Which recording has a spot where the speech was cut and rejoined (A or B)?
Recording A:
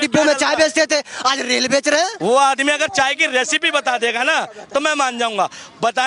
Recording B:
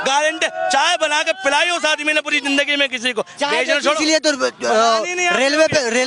A